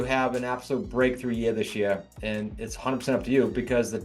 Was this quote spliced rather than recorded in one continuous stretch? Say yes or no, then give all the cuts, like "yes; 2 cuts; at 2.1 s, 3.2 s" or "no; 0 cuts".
no; 0 cuts